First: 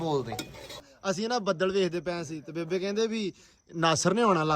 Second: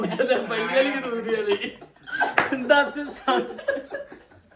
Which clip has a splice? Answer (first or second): first